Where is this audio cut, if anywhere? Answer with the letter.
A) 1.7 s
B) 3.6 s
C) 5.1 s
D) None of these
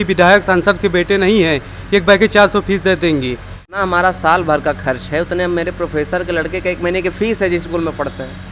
B